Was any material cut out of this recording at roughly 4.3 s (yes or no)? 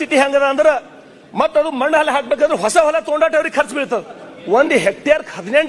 yes